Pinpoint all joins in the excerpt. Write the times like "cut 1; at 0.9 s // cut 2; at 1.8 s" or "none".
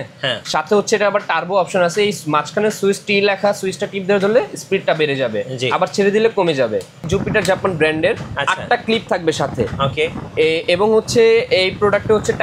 cut 1; at 7.1 s